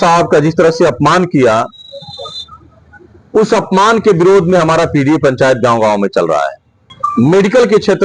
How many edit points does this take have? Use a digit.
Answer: 1